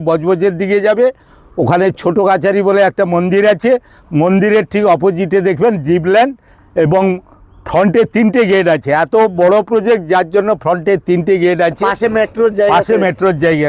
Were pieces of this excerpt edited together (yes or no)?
no